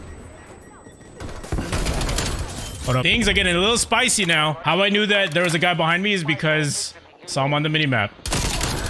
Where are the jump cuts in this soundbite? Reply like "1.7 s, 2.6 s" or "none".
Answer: 3.1 s, 4.6 s